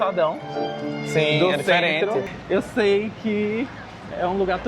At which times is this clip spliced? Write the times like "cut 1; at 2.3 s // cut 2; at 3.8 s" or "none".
cut 1; at 2.3 s